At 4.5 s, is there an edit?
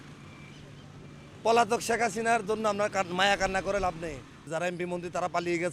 yes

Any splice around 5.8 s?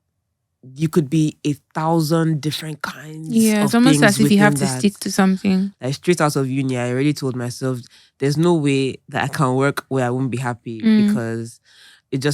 yes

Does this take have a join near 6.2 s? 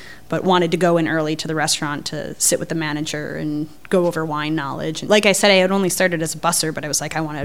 no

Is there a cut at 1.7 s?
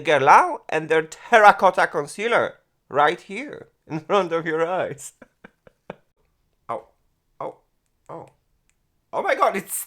no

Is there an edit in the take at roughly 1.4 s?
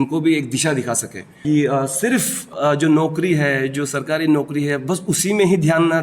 yes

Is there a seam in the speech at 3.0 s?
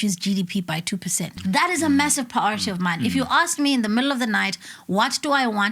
no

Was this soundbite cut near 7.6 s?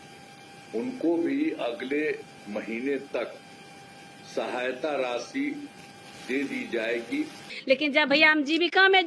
yes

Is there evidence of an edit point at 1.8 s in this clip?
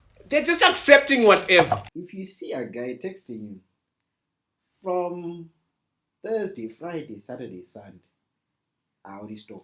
yes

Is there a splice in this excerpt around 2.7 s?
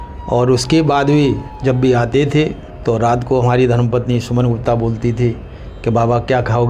yes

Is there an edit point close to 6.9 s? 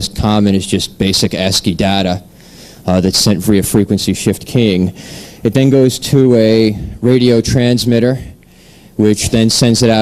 yes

